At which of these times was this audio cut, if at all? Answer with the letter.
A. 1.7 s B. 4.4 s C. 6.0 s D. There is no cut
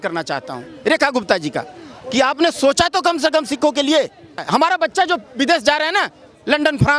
B